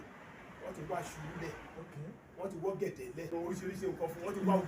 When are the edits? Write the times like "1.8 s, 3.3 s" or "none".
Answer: 3.3 s